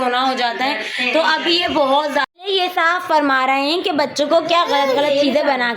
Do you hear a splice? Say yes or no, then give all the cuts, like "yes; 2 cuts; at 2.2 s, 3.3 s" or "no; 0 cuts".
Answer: yes; 1 cut; at 2.3 s